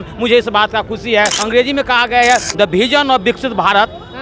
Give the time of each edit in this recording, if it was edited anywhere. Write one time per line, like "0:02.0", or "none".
0:01.4